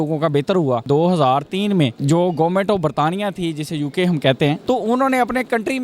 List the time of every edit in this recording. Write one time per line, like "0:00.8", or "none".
0:00.8
0:02.0
0:04.6